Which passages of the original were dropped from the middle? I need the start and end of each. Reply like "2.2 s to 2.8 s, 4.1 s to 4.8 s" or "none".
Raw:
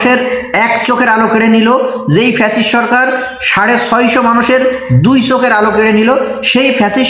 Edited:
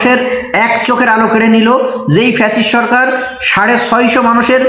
none